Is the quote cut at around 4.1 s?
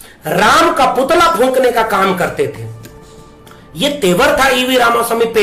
no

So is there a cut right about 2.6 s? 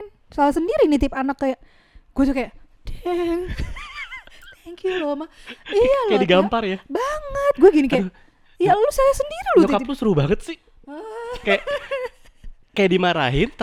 no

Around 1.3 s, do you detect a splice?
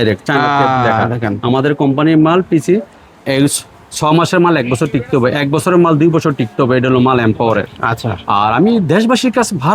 no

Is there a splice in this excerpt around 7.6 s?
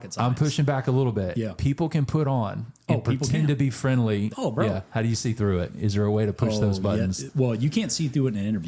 no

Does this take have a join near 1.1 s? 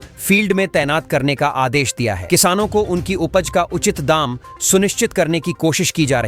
no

